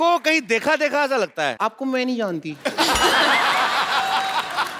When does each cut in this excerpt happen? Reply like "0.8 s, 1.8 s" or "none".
1.6 s